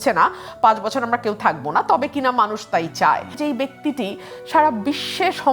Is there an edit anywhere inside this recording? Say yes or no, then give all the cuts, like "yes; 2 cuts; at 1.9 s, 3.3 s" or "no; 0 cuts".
yes; 1 cut; at 3.4 s